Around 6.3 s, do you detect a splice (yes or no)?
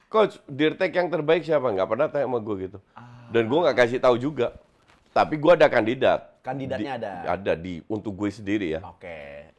no